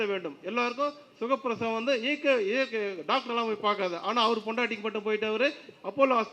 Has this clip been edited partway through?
no; 0 cuts

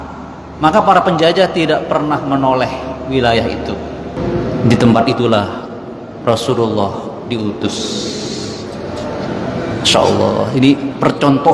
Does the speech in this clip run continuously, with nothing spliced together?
no; 1 cut; at 4.2 s

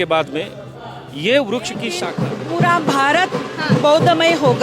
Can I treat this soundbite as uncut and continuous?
no; 1 cut; at 2.0 s

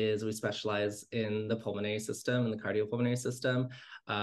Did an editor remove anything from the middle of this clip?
no; 0 cuts

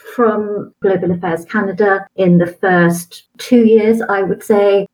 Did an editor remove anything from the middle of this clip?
no; 0 cuts

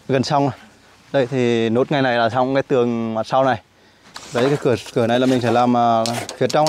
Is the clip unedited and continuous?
no; 1 cut; at 4.1 s

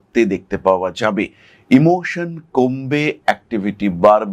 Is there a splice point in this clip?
no; 0 cuts

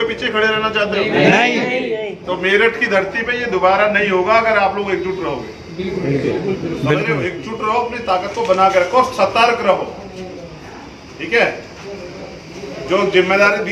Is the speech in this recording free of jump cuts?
yes; 0 cuts

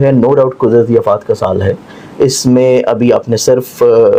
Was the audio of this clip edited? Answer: no; 0 cuts

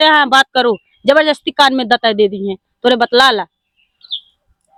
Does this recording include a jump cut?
no; 0 cuts

